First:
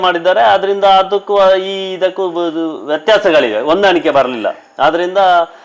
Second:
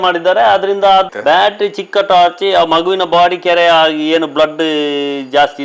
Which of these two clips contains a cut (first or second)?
second